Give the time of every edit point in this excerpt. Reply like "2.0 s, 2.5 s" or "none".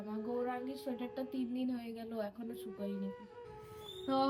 3.3 s